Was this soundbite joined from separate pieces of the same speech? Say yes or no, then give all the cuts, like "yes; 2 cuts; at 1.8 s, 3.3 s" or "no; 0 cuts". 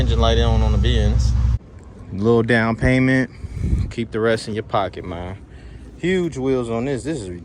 yes; 1 cut; at 1.6 s